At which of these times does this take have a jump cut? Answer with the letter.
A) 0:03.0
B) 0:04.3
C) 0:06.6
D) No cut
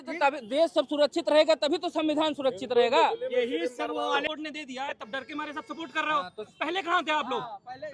B